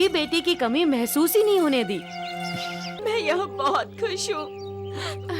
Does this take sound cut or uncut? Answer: cut